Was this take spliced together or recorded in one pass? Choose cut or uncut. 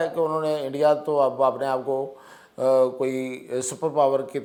uncut